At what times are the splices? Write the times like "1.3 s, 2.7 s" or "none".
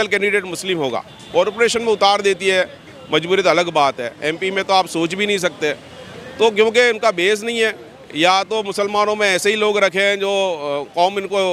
none